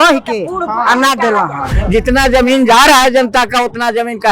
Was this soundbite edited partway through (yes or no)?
yes